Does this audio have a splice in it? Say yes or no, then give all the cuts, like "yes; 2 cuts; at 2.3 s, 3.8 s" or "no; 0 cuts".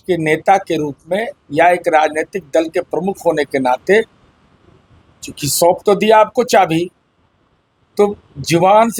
no; 0 cuts